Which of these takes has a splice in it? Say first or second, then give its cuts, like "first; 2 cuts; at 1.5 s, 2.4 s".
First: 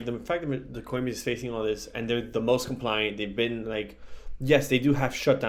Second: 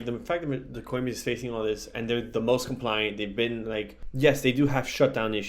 second; 1 cut; at 4.0 s